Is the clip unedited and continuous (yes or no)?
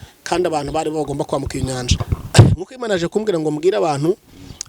no